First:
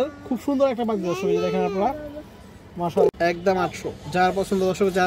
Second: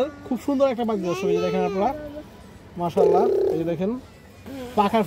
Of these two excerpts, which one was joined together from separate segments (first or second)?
first